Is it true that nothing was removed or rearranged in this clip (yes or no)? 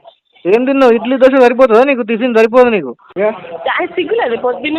no